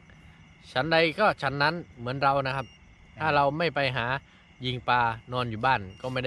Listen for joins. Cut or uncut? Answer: uncut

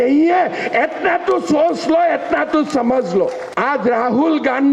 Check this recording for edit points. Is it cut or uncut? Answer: cut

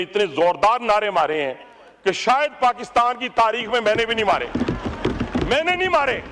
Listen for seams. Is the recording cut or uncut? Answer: uncut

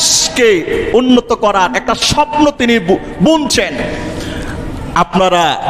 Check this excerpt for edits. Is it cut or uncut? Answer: uncut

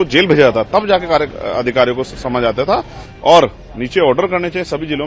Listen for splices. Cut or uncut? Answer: cut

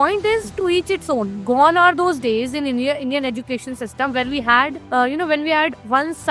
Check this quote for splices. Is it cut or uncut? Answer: cut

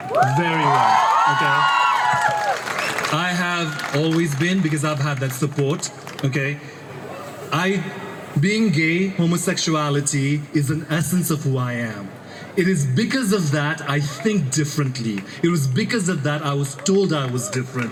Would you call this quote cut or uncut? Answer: uncut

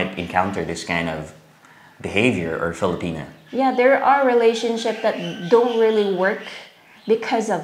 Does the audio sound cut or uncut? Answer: uncut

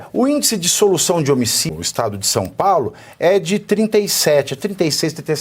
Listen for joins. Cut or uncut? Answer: cut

